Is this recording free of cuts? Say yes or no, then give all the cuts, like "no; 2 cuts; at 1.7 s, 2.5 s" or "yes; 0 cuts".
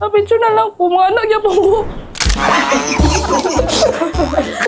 yes; 0 cuts